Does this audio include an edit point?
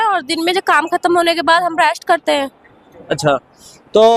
no; 0 cuts

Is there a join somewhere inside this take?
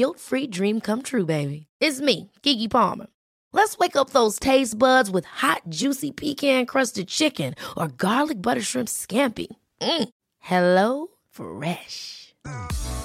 no; 0 cuts

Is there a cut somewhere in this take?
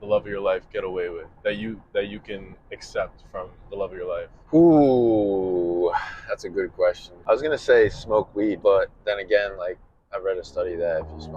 yes; 3 cuts; at 4.4 s, 7.1 s, 8.6 s

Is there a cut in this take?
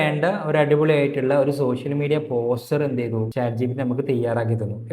yes; 1 cut; at 3.3 s

